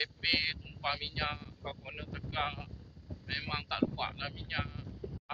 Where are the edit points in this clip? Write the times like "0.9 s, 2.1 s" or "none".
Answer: none